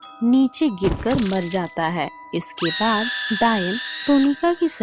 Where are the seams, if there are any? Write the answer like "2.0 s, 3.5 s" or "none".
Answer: none